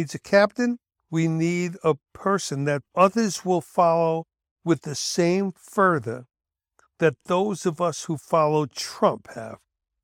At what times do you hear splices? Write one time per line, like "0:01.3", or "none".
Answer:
0:00.9